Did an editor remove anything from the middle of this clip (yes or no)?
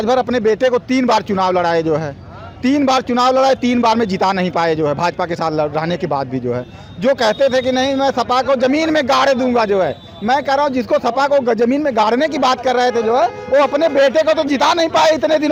no